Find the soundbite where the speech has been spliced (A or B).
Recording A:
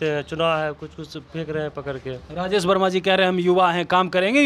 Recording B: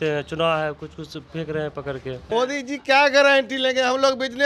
B